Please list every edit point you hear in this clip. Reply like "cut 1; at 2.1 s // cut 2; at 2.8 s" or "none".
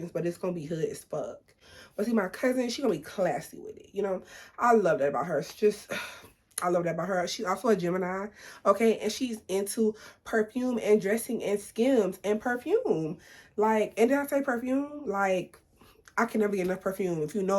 none